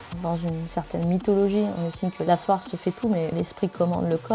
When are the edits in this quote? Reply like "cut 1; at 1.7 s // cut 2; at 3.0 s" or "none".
cut 1; at 3.3 s

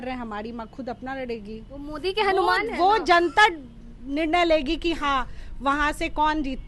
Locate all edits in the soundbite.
none

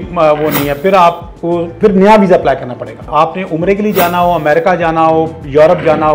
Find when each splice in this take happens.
cut 1; at 3.0 s

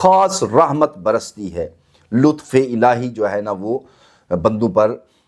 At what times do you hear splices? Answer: none

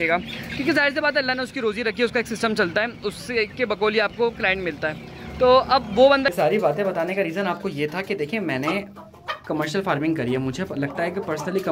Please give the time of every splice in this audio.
cut 1; at 6.3 s

